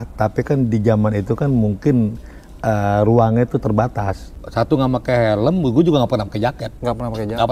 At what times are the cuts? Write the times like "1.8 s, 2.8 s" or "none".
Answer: 4.2 s